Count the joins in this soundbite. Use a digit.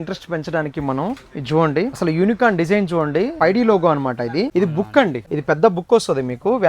4